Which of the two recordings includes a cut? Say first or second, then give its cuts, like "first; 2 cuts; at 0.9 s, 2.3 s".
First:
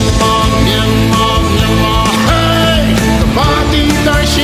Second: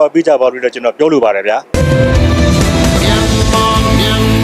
second; 1 cut; at 1.7 s